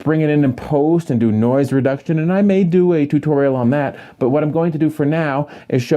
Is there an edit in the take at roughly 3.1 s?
no; 1 cut; at 4.9 s

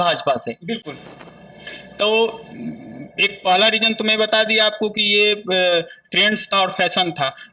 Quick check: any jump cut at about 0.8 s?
no; 0 cuts

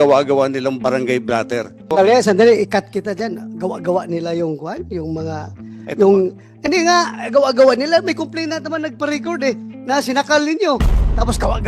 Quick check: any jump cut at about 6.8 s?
no; 1 cut; at 1.9 s

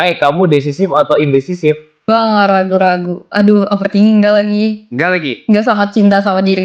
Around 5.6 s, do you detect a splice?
no; 1 cut; at 1.9 s

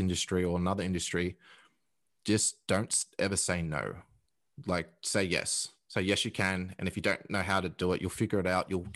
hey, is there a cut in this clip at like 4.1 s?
no; 0 cuts

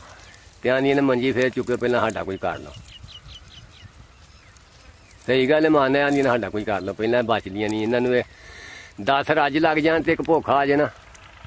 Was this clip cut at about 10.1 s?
no; 0 cuts

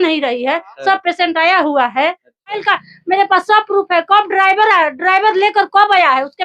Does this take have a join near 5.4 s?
no; 1 cut; at 2.6 s

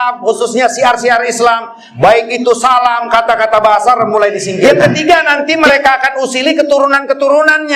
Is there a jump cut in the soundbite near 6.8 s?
no; 1 cut; at 4.6 s

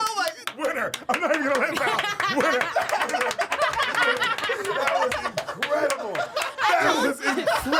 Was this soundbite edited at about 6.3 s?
no; 0 cuts

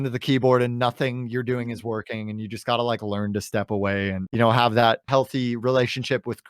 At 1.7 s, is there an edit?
no; 2 cuts; at 4.2 s, 5.0 s

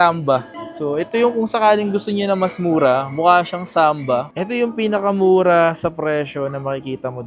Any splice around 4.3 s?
yes; 1 cut; at 4.3 s

